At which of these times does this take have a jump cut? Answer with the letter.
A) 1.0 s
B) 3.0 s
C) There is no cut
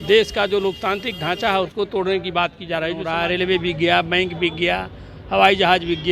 B